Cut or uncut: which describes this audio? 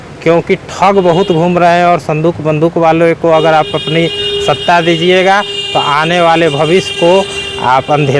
uncut